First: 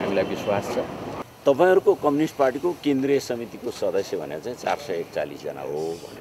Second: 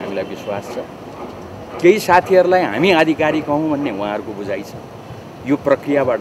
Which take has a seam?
first; 1 cut; at 1.2 s

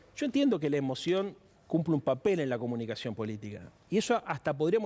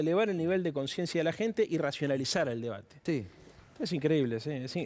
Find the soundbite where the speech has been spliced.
second; 1 cut; at 3.0 s

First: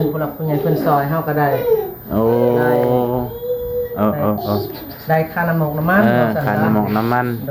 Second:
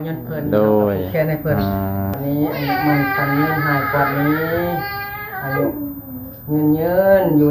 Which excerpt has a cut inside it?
second; 1 cut; at 2.2 s

